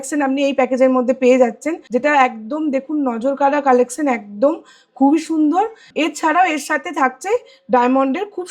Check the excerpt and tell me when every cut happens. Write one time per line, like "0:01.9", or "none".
0:01.7
0:05.8